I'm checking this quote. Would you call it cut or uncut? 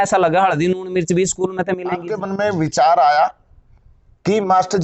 cut